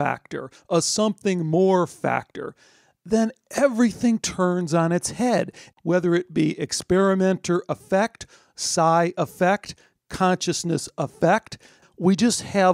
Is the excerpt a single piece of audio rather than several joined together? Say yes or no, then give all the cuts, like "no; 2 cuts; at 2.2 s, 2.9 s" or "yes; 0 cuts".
no; 2 cuts; at 5.6 s, 11.8 s